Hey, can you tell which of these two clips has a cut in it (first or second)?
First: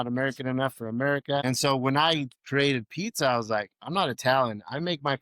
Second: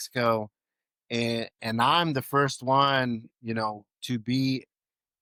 first